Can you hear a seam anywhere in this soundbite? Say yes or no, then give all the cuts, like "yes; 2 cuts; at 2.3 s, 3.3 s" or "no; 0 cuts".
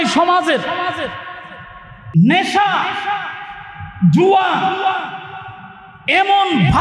yes; 1 cut; at 2.0 s